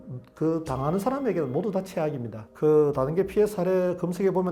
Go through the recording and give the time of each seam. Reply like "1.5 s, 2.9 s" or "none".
none